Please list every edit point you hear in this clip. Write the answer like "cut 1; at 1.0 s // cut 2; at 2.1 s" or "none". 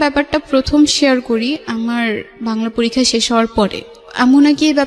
none

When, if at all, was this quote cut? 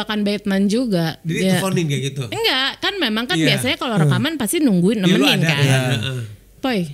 none

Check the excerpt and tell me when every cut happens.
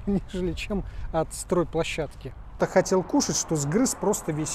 cut 1; at 2.6 s

